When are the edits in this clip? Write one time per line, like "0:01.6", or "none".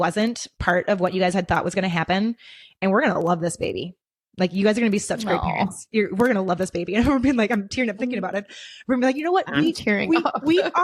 none